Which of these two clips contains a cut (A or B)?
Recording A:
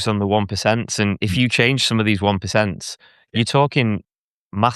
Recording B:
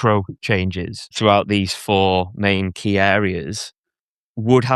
B